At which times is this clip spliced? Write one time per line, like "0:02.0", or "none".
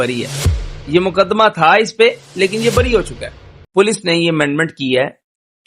0:03.5